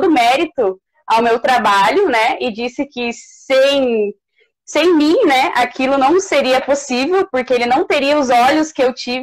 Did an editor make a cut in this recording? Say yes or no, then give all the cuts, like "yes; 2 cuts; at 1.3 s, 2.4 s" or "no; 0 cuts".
no; 0 cuts